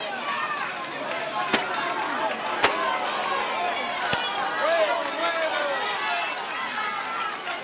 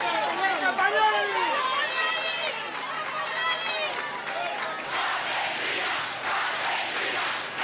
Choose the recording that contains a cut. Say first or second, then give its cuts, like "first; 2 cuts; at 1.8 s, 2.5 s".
second; 1 cut; at 4.8 s